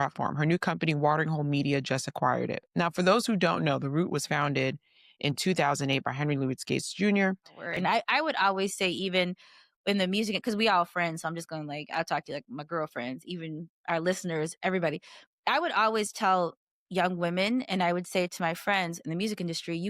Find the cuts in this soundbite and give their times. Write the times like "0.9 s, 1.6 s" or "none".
7.7 s